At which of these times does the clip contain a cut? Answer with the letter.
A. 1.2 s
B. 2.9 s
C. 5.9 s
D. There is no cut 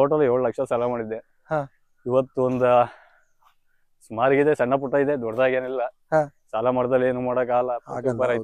D